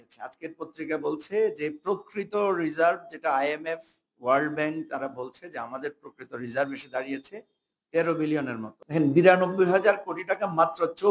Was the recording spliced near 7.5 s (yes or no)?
no